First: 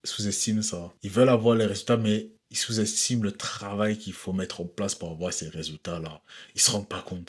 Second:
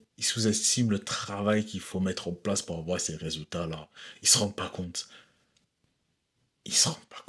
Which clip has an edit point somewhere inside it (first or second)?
first